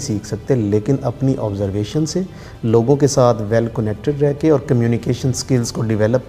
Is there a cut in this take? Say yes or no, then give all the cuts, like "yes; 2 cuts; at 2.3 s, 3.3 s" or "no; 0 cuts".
no; 0 cuts